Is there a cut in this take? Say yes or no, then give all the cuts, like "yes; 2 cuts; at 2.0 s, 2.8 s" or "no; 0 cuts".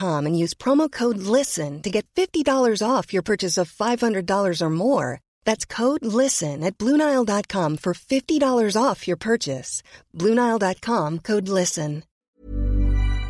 yes; 1 cut; at 12.2 s